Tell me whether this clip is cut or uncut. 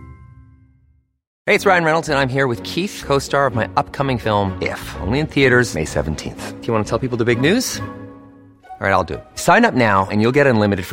cut